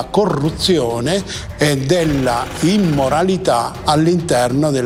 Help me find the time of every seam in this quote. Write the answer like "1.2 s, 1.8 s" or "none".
none